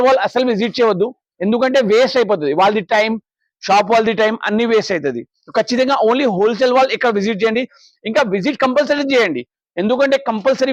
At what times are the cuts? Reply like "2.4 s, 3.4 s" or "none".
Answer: none